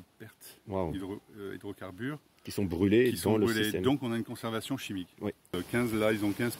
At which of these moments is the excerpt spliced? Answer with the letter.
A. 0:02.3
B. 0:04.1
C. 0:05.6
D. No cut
C